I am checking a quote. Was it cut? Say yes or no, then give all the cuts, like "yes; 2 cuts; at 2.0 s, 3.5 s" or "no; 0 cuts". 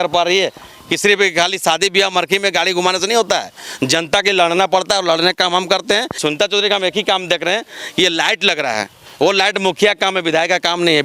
yes; 1 cut; at 6.2 s